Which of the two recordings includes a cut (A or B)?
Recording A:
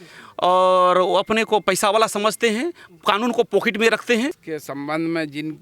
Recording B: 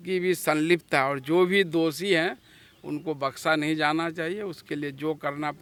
A